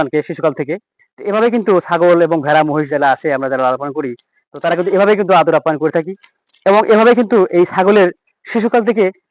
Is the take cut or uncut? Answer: uncut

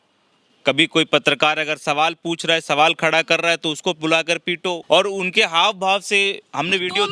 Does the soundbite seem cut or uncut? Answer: uncut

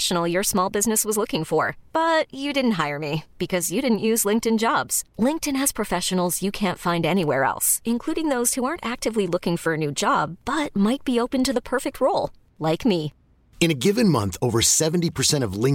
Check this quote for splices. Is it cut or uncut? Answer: uncut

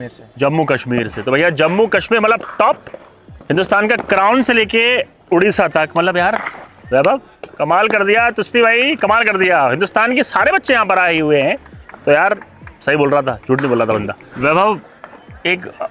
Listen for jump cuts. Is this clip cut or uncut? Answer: uncut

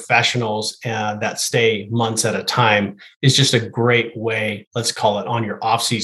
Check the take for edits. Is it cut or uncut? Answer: uncut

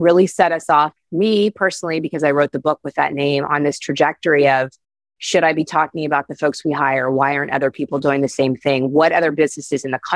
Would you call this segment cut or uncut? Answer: uncut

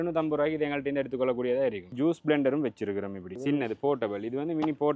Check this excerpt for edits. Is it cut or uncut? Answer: cut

